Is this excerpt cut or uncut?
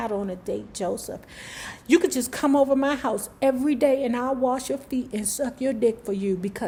uncut